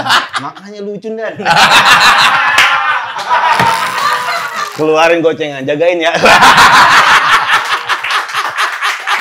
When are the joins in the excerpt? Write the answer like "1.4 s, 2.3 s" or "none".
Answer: 4.6 s